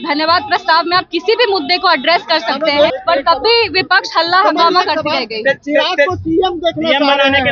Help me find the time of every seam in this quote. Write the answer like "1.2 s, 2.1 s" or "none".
2.9 s

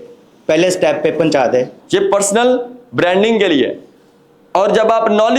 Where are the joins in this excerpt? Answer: 1.8 s

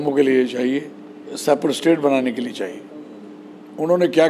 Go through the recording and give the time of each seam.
1.4 s

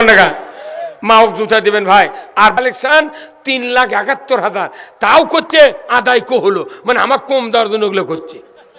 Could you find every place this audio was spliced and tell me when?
2.6 s

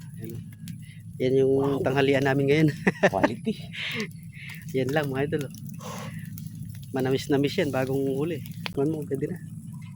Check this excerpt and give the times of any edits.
8.7 s

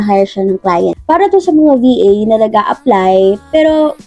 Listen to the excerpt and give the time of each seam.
0.9 s

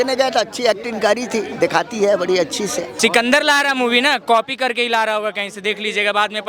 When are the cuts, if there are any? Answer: 2.9 s

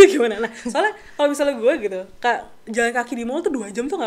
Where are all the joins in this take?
none

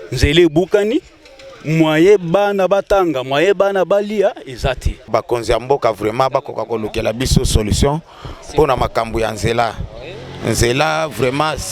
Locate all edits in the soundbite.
5.1 s

